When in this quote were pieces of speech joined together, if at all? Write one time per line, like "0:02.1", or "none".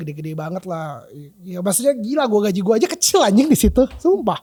none